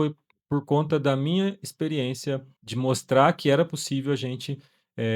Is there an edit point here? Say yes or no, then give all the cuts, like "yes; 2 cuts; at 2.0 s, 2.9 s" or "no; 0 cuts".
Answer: yes; 1 cut; at 2.6 s